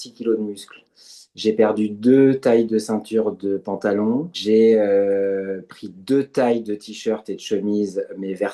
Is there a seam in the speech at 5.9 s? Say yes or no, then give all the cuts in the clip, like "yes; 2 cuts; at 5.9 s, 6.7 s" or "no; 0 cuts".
no; 1 cut; at 4.4 s